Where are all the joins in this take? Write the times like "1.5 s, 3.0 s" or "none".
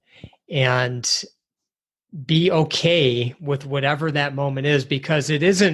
none